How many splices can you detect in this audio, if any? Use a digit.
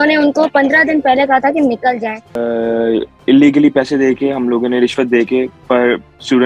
1